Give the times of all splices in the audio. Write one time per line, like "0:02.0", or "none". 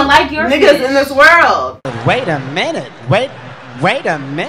none